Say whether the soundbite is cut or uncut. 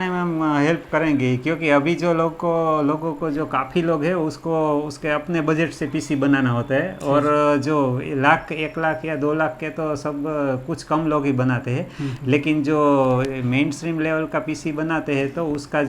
uncut